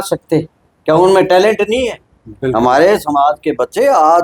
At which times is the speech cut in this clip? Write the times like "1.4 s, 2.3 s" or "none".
none